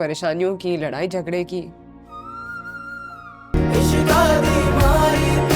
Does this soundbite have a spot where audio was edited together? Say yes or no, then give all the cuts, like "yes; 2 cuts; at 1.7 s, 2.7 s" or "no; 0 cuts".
yes; 1 cut; at 3.5 s